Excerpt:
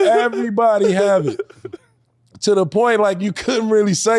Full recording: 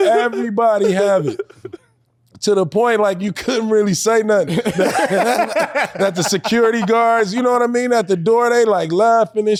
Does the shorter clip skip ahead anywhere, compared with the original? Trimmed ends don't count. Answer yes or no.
no